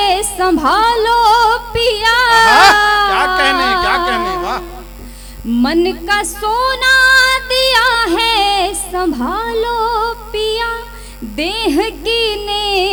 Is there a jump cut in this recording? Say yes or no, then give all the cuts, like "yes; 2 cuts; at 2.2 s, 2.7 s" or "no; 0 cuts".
no; 0 cuts